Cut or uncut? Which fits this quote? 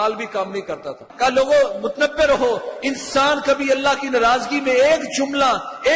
cut